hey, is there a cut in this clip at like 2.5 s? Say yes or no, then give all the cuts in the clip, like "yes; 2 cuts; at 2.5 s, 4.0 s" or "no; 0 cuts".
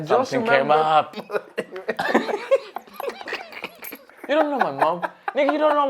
no; 2 cuts; at 1.2 s, 4.2 s